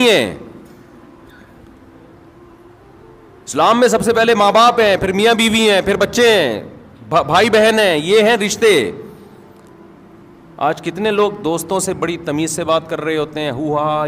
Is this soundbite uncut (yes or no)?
yes